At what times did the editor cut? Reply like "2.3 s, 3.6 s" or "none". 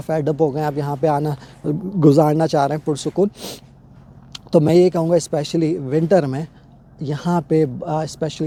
none